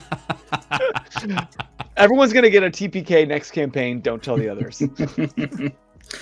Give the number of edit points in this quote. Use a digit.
0